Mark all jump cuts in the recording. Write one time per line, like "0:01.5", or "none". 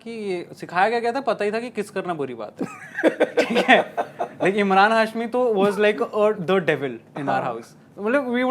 none